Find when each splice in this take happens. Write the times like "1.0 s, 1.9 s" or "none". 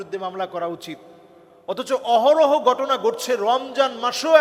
none